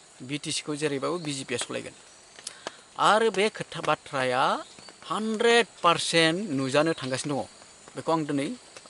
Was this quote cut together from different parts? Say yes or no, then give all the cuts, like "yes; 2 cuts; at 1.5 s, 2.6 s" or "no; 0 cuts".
no; 0 cuts